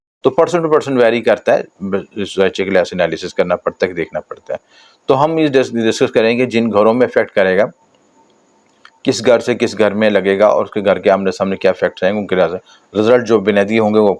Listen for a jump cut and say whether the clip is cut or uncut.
uncut